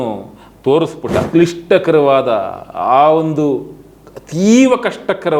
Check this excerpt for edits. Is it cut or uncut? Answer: cut